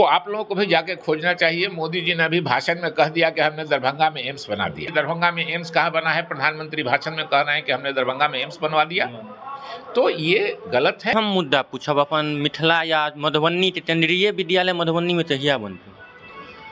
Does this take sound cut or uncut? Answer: cut